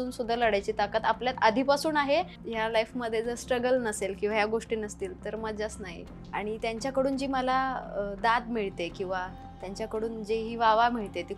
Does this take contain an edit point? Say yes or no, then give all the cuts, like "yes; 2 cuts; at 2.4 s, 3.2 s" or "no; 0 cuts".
yes; 2 cuts; at 2.4 s, 6.1 s